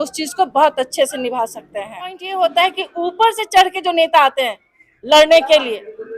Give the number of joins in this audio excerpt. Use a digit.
1